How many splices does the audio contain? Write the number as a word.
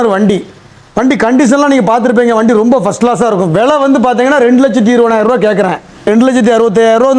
one